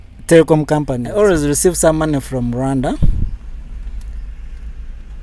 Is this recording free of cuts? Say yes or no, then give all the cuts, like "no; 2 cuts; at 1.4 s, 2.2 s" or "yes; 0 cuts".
no; 1 cut; at 1.0 s